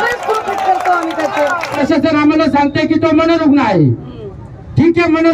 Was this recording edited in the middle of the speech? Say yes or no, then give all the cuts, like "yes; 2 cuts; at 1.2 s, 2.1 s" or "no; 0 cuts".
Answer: yes; 1 cut; at 1.8 s